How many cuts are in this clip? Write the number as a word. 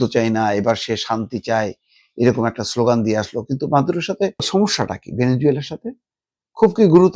one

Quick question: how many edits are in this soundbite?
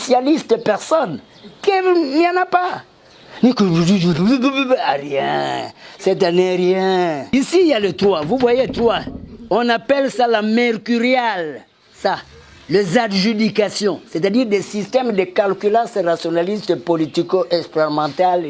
one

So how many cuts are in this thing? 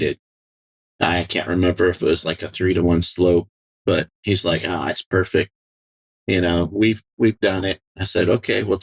zero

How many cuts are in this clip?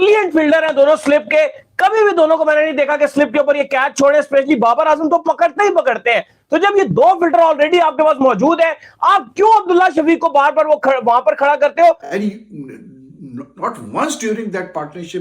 one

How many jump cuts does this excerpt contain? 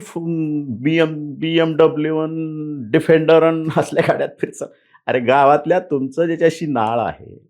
zero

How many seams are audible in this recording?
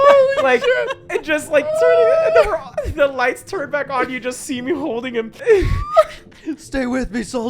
one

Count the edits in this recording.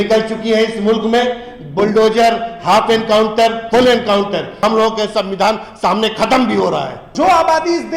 two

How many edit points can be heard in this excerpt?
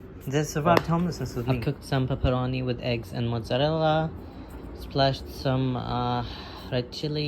one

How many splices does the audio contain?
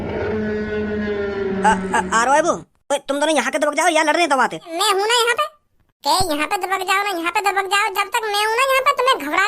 one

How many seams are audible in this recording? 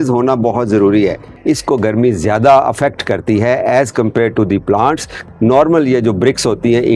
two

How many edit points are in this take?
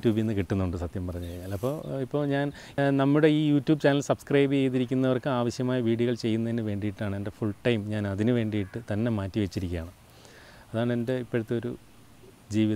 zero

